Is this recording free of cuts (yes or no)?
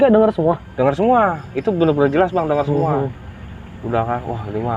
yes